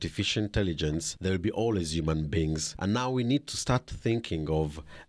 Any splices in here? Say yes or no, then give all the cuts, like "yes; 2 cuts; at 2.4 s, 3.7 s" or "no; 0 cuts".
yes; 2 cuts; at 1.1 s, 2.7 s